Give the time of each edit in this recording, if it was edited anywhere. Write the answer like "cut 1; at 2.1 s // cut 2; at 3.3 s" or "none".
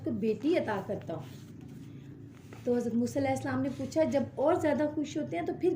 none